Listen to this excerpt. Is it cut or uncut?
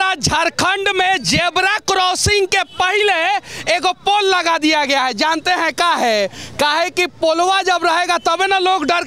uncut